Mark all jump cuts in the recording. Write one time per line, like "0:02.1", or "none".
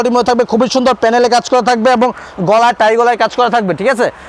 none